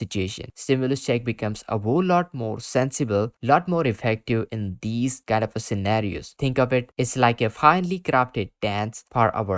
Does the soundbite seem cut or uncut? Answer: cut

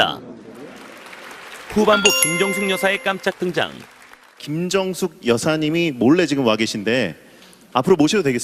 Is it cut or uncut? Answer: cut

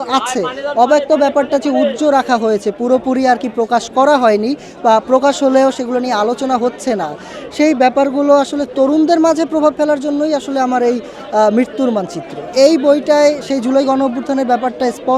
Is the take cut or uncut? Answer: cut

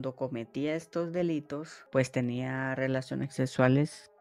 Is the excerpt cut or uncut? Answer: cut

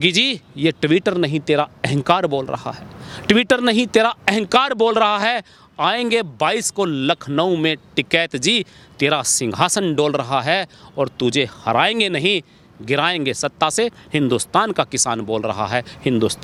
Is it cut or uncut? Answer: uncut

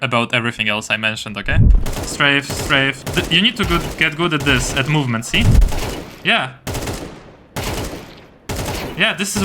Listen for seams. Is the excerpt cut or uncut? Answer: cut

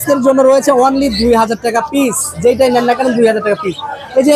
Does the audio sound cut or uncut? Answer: uncut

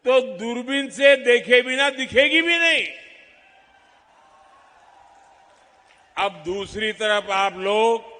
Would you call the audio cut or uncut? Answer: uncut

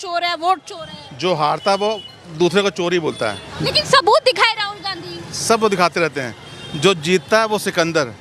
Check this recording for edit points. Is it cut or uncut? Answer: cut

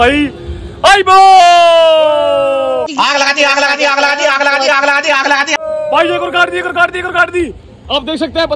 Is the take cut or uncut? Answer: uncut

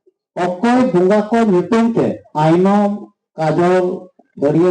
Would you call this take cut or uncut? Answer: cut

